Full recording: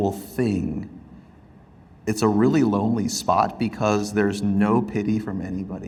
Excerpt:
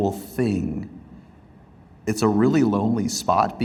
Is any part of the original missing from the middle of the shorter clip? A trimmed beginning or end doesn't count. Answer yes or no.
no